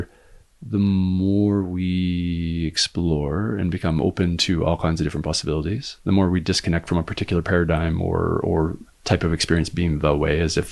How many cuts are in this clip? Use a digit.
1